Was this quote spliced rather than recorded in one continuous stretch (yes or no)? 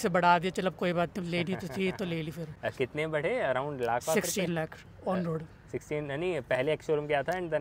no